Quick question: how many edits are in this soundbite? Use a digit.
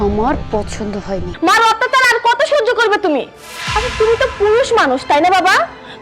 1